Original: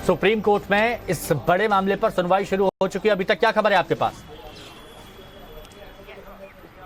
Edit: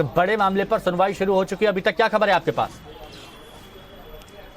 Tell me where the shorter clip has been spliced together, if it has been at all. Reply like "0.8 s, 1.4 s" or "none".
1.4 s